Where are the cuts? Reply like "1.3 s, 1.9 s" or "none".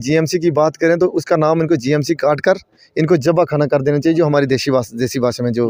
none